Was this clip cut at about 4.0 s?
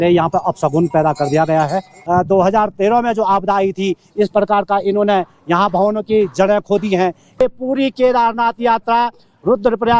no; 2 cuts; at 2.0 s, 7.4 s

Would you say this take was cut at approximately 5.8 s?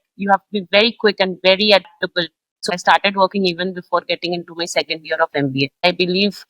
yes; 2 cuts; at 2.8 s, 5.8 s

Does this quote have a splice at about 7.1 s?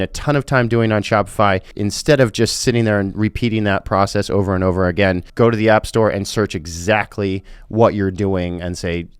no; 2 cuts; at 1.7 s, 5.2 s

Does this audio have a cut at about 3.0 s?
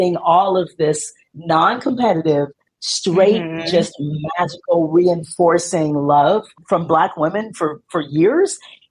no; 1 cut; at 6.6 s

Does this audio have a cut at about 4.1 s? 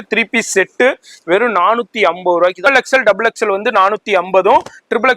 no; 1 cut; at 2.6 s

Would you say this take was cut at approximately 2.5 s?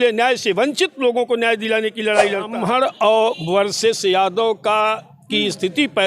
yes; 1 cut; at 2.5 s

